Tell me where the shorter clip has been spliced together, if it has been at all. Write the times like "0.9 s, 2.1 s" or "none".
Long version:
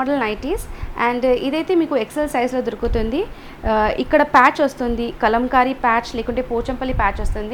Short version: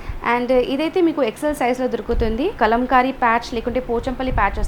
2.5 s